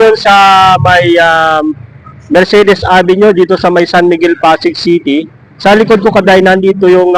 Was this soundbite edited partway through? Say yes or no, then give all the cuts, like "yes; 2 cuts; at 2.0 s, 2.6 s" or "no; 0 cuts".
no; 0 cuts